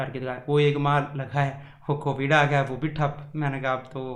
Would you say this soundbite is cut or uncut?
uncut